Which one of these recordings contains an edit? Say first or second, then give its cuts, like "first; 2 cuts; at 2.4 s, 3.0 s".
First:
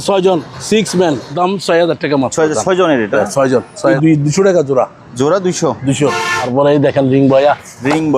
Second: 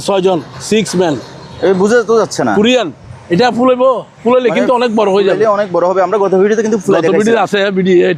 first; 3 cuts; at 1.3 s, 4.0 s, 6.5 s